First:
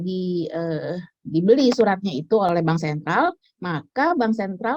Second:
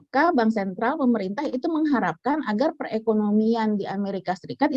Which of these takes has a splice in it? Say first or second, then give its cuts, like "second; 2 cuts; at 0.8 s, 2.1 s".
first; 1 cut; at 2.5 s